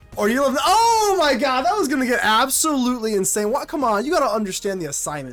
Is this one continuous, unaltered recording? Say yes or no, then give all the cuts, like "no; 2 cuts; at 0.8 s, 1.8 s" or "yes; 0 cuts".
yes; 0 cuts